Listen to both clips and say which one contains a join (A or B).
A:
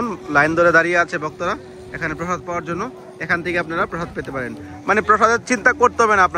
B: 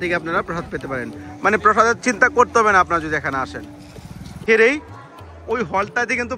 B